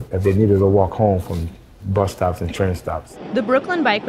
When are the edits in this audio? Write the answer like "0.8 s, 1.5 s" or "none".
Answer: 3.1 s